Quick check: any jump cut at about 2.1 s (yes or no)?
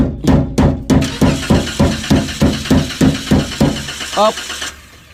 no